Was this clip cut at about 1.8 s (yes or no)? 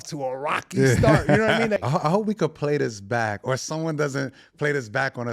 yes